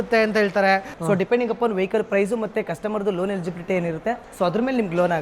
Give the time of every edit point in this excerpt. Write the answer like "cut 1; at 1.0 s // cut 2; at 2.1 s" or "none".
cut 1; at 0.9 s // cut 2; at 4.3 s